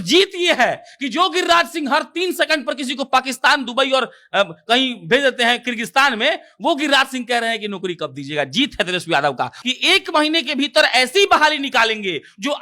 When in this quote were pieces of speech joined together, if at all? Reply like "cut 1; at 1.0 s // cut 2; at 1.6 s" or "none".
cut 1; at 9.6 s